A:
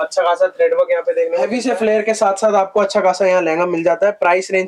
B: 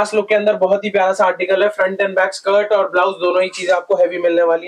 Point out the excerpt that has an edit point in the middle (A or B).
A